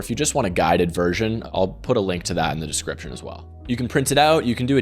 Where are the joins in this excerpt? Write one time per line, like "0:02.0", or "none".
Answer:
0:01.4